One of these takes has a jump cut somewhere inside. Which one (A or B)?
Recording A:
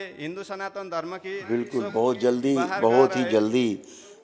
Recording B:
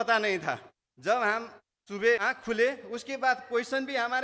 B